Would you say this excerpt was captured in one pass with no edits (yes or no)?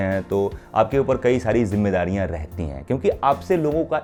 yes